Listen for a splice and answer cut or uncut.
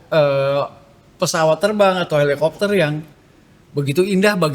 uncut